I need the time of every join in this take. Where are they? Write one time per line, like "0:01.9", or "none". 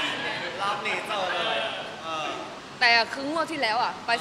0:02.6